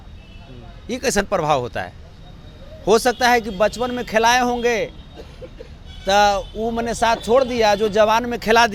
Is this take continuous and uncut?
yes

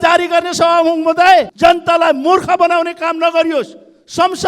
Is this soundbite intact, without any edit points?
no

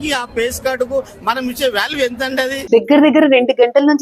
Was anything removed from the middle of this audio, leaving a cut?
yes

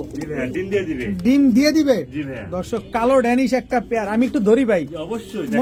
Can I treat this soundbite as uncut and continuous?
yes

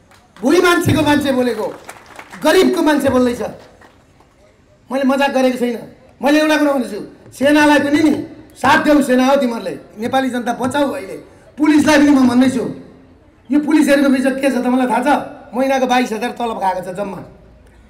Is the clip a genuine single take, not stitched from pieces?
yes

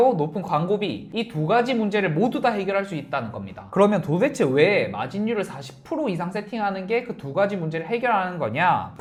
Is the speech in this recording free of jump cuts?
yes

